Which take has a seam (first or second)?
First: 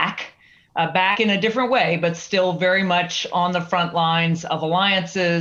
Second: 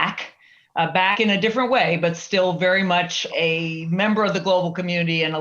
second